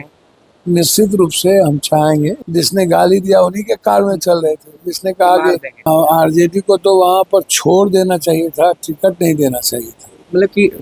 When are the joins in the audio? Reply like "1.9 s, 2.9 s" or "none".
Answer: 2.4 s, 5.9 s